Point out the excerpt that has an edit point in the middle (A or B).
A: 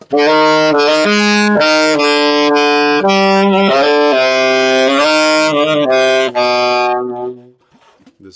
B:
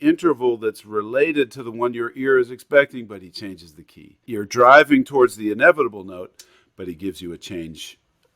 B